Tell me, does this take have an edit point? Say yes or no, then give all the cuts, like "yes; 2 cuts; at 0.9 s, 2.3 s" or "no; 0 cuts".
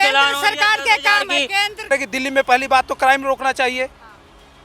yes; 1 cut; at 1.9 s